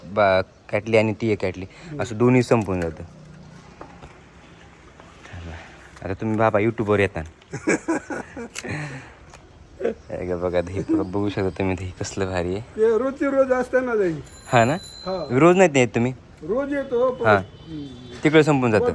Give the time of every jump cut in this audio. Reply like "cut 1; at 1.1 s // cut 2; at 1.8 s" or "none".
none